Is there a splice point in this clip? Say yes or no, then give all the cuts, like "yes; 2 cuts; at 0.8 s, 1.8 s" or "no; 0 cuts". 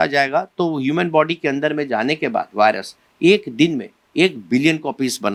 no; 0 cuts